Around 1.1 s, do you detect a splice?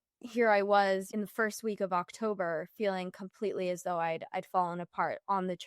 yes; 1 cut; at 1.1 s

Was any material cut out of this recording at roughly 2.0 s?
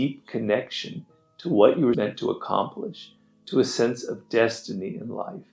yes; 1 cut; at 2.0 s

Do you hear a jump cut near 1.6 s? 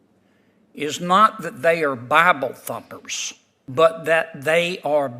no; 1 cut; at 3.7 s

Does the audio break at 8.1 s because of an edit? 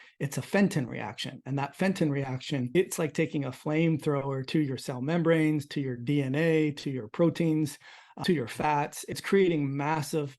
yes; 3 cuts; at 2.7 s, 8.1 s, 9.2 s

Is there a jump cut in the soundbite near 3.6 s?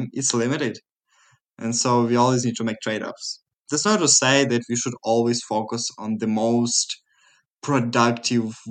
yes; 1 cut; at 3.6 s

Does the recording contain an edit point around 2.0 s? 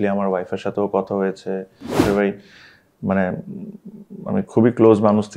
yes; 1 cut; at 2.0 s

